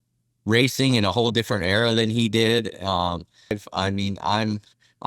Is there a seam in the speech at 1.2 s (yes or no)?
no